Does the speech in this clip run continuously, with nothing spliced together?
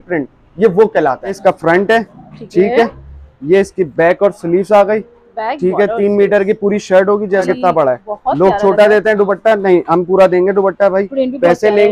no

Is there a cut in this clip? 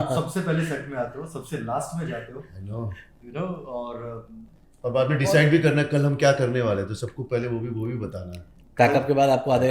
no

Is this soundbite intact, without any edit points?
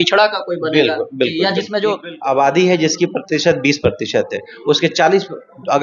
no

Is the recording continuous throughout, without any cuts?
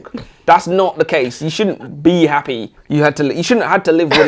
no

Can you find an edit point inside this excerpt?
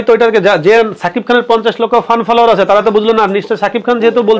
no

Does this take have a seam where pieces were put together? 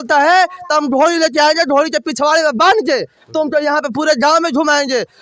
no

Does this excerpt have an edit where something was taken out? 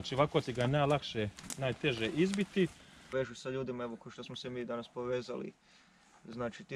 yes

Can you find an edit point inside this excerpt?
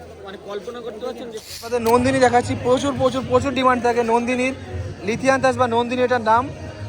yes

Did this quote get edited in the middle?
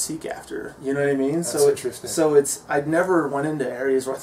no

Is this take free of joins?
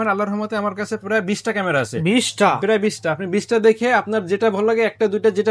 yes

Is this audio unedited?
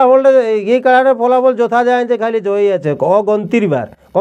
yes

